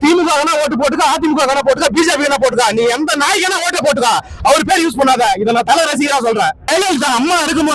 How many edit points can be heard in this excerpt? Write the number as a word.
one